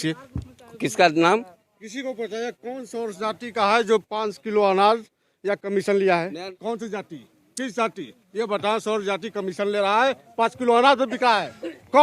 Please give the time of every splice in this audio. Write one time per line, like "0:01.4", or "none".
0:06.4